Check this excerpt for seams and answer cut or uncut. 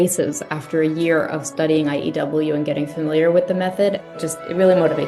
cut